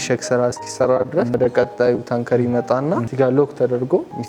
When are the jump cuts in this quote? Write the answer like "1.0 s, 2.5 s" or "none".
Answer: 1.3 s, 3.1 s